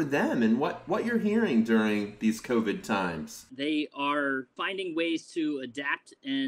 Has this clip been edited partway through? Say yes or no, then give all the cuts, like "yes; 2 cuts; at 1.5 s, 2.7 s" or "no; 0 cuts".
yes; 2 cuts; at 3.5 s, 4.5 s